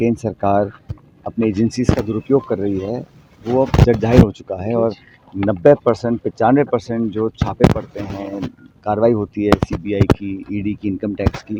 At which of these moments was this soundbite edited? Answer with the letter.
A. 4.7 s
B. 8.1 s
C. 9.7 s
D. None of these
D